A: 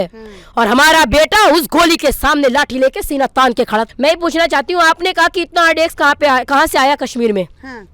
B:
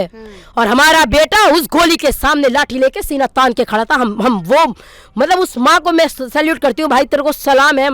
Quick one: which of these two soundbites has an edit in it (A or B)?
A